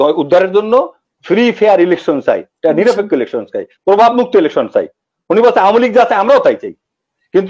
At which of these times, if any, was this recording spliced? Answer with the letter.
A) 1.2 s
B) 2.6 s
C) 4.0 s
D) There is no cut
D